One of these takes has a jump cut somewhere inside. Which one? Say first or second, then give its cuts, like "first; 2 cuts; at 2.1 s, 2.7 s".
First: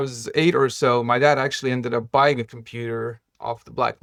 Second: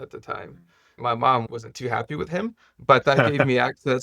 second; 1 cut; at 1.0 s